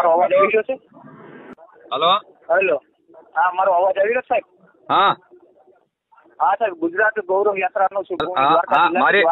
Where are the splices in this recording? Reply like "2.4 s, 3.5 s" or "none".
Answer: 8.2 s